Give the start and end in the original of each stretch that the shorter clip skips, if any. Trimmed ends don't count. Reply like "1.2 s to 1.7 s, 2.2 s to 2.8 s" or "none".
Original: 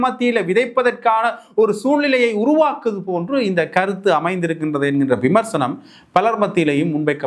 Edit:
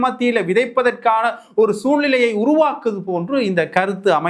none